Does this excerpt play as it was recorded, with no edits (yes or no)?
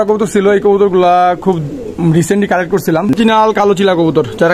no